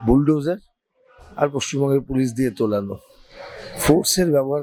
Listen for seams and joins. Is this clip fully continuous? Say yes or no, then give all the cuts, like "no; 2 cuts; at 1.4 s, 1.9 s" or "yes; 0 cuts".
yes; 0 cuts